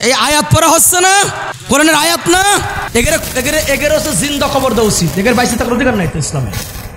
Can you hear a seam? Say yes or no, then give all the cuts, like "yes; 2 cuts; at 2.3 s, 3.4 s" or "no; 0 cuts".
yes; 2 cuts; at 1.5 s, 2.9 s